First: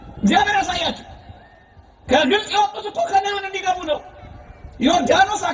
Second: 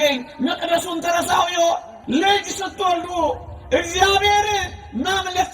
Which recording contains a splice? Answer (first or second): second